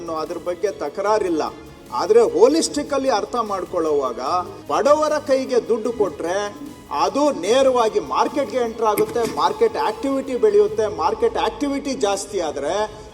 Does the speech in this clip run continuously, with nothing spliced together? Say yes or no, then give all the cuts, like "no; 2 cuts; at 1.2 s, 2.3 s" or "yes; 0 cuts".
no; 1 cut; at 4.6 s